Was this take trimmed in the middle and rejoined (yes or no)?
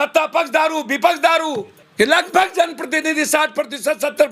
yes